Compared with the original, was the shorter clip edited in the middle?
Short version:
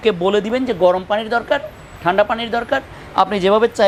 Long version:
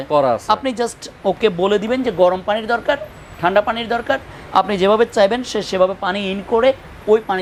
no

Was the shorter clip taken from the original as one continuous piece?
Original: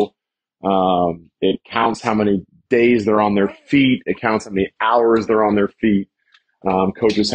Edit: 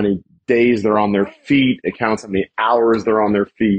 yes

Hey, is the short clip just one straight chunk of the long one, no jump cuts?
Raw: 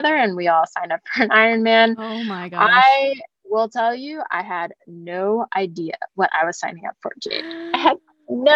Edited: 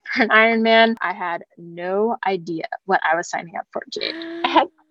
no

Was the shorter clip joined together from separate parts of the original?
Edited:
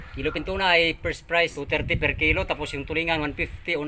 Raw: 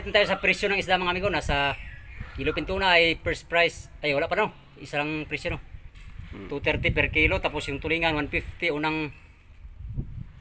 yes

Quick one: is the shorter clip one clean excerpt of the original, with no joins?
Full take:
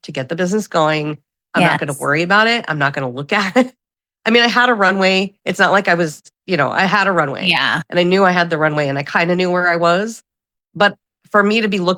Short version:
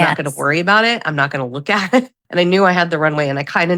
no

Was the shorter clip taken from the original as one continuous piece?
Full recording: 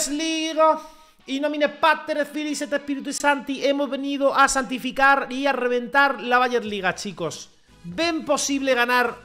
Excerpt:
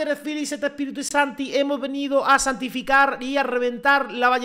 yes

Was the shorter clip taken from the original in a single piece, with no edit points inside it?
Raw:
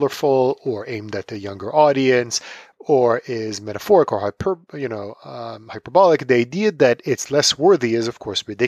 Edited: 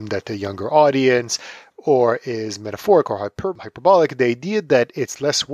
no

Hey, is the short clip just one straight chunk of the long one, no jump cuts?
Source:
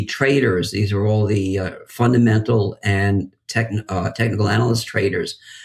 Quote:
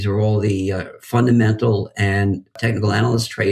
no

